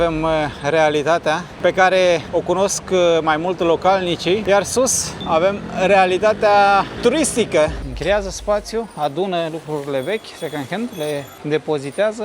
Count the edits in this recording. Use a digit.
3